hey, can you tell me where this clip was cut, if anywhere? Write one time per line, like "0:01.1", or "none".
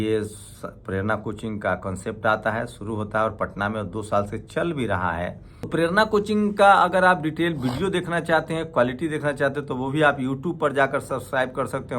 0:05.7

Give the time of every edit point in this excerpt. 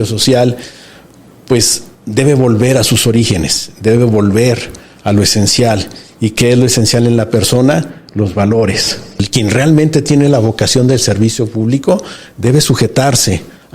0:09.3

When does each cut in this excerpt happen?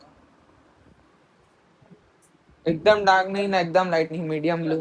none

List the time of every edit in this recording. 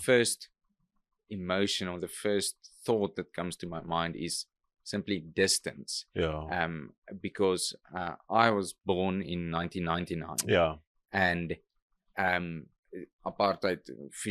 none

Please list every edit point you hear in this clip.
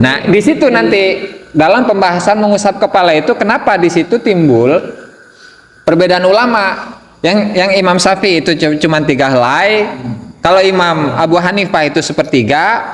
none

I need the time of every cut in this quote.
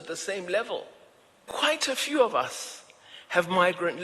0:01.5

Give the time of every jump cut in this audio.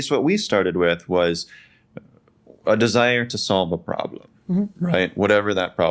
none

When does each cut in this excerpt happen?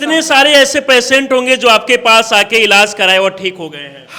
none

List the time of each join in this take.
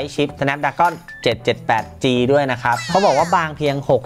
0:02.9

